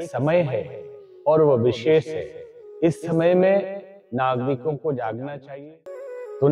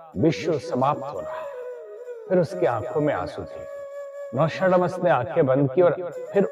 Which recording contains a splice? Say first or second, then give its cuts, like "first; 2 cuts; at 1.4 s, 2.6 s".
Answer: first; 1 cut; at 5.5 s